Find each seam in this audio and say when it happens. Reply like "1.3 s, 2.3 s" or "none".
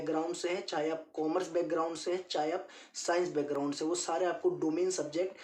none